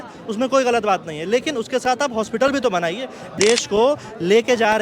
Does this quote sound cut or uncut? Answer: cut